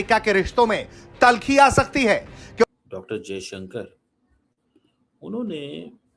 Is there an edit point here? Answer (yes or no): yes